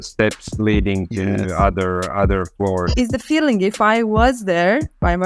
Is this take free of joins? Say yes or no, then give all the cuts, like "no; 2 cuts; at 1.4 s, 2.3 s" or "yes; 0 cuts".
no; 1 cut; at 2.9 s